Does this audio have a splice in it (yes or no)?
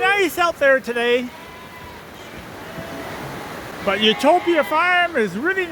no